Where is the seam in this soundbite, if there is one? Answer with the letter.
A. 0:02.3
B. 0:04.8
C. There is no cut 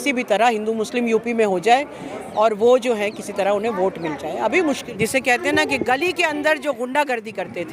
B